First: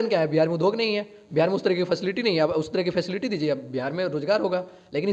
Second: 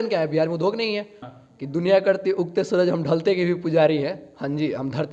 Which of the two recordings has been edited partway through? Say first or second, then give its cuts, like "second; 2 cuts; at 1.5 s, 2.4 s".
second; 1 cut; at 1.2 s